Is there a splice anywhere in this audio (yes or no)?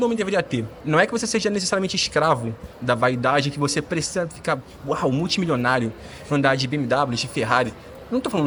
no